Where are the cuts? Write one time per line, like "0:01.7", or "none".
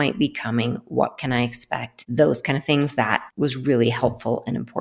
0:02.0
0:03.2